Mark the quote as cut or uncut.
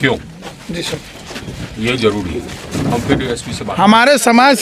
cut